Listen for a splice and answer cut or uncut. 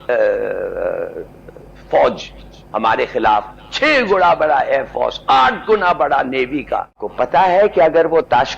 cut